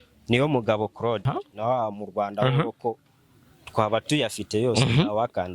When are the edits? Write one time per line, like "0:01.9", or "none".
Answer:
0:01.3